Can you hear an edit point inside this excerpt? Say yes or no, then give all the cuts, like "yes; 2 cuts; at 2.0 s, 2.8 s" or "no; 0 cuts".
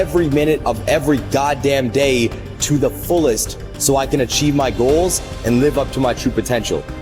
no; 0 cuts